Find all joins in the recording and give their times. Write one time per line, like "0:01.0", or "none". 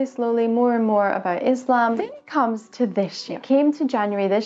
none